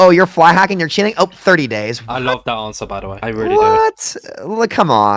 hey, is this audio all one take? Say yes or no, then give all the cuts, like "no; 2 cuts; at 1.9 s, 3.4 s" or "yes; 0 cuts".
yes; 0 cuts